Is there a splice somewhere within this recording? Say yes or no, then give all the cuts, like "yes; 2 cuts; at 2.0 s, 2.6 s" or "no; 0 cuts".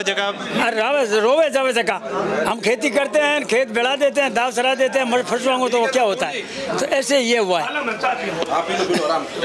no; 0 cuts